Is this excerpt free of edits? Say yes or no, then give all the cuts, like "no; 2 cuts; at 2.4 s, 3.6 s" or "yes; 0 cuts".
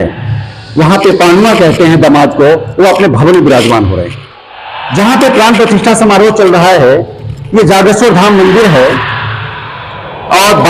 yes; 0 cuts